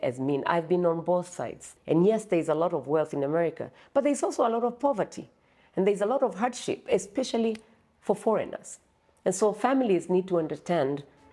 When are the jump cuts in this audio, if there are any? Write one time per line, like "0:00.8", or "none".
0:01.7